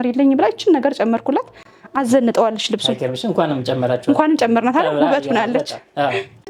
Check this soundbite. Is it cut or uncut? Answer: uncut